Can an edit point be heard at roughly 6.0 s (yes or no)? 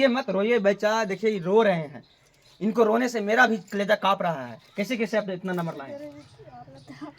yes